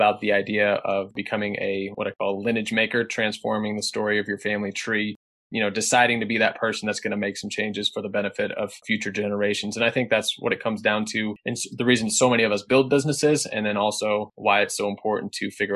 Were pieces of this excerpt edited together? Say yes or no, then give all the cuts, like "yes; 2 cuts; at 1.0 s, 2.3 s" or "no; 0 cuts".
yes; 1 cut; at 1.2 s